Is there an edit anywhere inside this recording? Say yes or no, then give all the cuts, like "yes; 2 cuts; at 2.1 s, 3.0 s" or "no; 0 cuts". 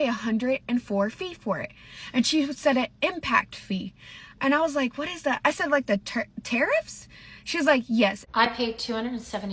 yes; 1 cut; at 8.2 s